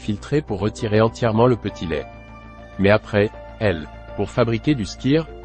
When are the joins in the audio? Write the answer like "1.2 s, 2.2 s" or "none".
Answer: none